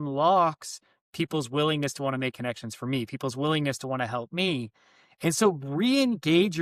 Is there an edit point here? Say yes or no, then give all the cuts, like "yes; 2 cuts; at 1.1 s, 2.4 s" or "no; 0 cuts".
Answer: no; 0 cuts